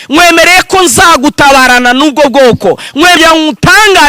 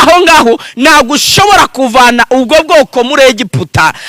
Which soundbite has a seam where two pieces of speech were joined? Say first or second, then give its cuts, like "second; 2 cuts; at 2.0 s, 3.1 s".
first; 1 cut; at 3.2 s